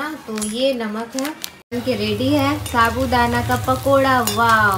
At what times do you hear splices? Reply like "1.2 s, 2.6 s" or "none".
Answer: 1.8 s